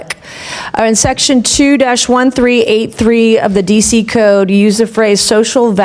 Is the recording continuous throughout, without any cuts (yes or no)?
yes